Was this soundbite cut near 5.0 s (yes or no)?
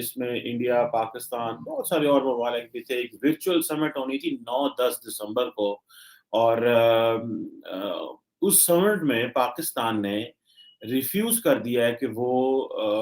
no